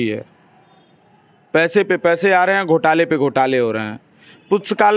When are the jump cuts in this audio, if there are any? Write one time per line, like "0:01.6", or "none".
none